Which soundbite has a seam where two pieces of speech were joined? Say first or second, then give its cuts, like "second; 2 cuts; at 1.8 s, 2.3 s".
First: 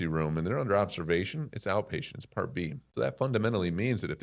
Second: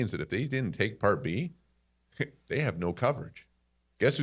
first; 1 cut; at 2.8 s